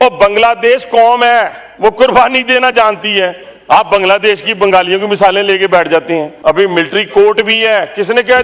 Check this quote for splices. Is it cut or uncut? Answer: cut